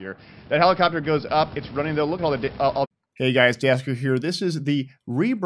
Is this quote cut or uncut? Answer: uncut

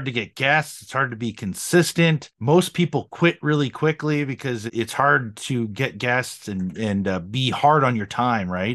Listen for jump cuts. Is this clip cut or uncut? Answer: cut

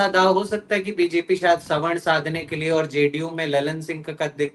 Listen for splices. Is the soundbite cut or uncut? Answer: uncut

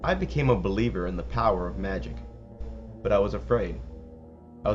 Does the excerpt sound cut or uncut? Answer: cut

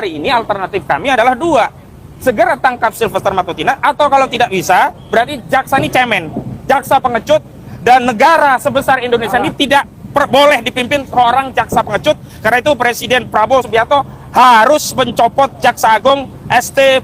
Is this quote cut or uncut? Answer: uncut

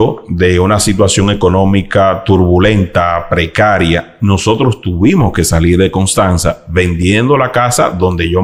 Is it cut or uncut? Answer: uncut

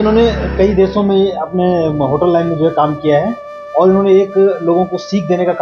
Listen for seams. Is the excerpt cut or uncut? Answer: uncut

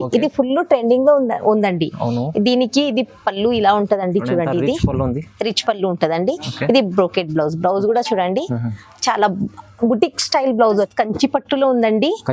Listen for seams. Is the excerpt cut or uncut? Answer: cut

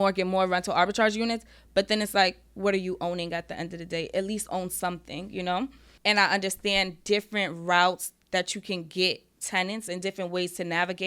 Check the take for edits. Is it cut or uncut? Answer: cut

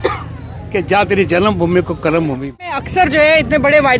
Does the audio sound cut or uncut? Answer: cut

